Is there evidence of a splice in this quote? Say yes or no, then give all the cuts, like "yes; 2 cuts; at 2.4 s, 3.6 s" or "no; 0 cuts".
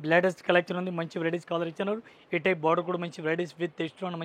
no; 0 cuts